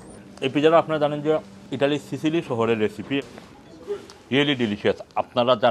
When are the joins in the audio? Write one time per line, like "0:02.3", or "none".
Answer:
0:01.6
0:03.2